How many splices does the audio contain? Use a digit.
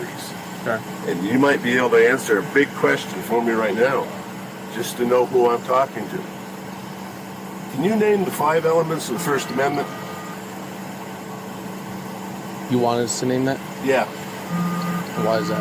0